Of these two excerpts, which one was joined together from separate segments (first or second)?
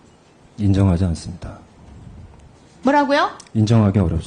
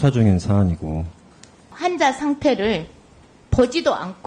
second